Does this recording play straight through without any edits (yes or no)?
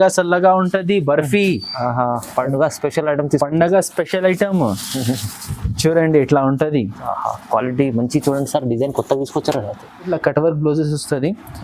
no